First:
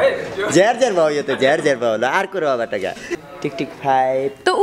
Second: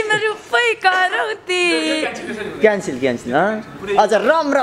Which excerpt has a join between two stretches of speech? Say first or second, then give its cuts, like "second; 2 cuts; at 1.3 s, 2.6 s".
first; 1 cut; at 3.2 s